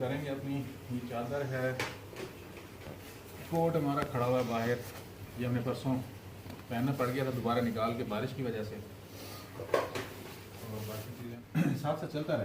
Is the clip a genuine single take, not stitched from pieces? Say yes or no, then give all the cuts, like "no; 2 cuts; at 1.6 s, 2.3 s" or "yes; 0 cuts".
no; 1 cut; at 11.3 s